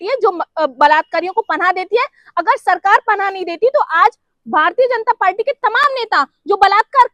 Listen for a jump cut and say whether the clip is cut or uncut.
uncut